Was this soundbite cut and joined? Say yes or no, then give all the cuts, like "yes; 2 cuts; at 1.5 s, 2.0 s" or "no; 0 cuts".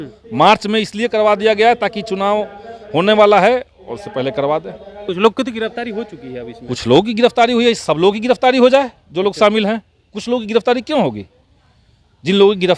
yes; 1 cut; at 5.0 s